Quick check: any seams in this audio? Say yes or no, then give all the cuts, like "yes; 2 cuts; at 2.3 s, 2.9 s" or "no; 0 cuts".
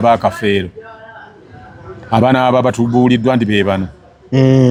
no; 0 cuts